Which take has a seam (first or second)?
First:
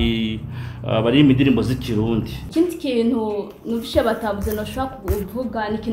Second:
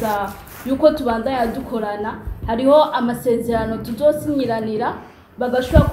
first